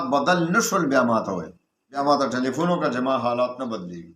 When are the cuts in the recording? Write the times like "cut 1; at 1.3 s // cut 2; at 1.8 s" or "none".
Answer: cut 1; at 2.0 s